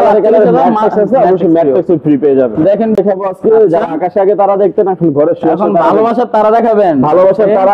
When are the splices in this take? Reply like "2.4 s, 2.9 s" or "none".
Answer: 3.0 s